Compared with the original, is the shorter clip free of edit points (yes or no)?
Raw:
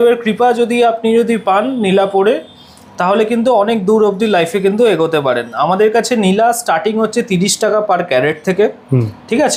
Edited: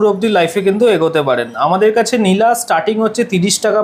yes